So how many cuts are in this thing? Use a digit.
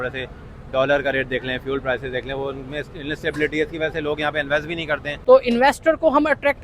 1